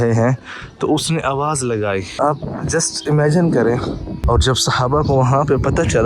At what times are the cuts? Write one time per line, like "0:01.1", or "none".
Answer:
0:02.1
0:04.1